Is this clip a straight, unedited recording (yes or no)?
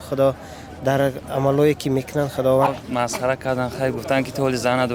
no